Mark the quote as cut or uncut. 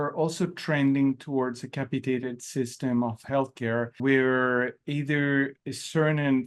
uncut